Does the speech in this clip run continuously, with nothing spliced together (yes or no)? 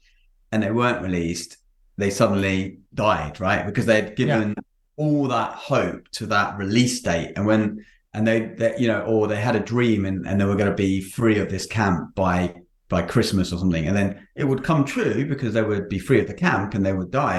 yes